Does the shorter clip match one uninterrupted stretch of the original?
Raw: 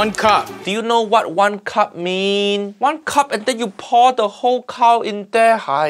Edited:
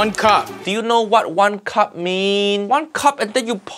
no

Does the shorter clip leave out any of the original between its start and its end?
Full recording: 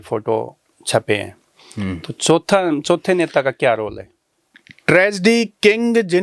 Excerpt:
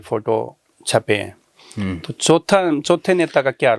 no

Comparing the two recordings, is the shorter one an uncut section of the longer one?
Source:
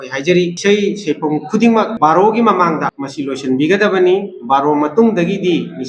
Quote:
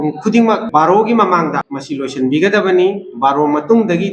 yes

